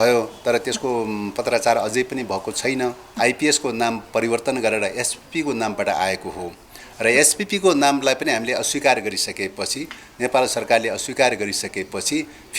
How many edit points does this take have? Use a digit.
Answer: 1